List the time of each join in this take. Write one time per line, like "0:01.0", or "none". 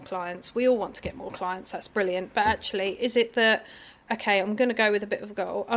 none